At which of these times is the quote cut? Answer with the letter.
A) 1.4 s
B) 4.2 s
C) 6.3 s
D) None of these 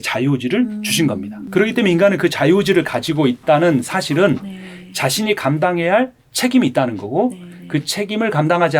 A